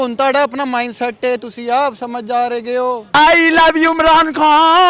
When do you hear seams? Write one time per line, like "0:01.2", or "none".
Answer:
0:03.1